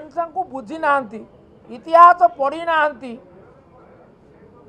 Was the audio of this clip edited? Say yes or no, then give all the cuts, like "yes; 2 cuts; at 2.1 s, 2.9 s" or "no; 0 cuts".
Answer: no; 0 cuts